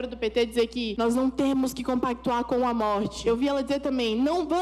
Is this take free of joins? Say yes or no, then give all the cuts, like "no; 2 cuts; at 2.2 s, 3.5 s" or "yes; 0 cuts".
no; 2 cuts; at 0.9 s, 3.1 s